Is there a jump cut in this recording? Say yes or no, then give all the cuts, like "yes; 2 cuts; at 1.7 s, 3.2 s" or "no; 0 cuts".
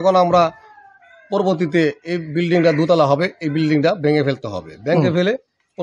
no; 0 cuts